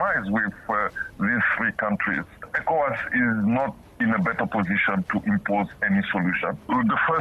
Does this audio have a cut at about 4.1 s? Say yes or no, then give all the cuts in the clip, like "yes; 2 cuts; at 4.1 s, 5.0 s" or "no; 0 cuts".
no; 1 cut; at 2.5 s